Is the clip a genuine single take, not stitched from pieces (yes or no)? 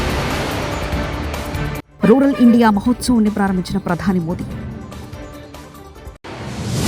yes